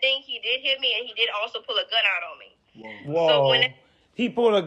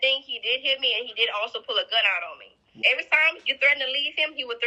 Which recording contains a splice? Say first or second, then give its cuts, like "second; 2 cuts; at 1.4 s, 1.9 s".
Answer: second; 1 cut; at 2.7 s